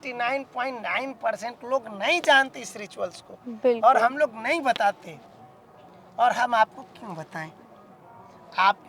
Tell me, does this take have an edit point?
no; 0 cuts

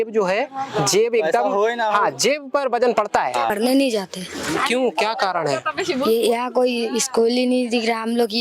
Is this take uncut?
no; 1 cut; at 3.5 s

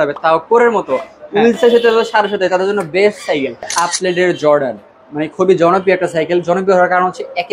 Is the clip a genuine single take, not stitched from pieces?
no; 1 cut; at 3.7 s

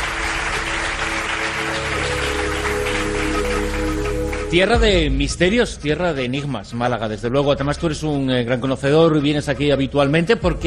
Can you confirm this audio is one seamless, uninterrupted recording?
no; 1 cut; at 3.5 s

